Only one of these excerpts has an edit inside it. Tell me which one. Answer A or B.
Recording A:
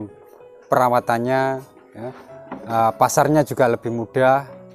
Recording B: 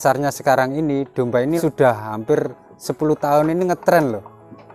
B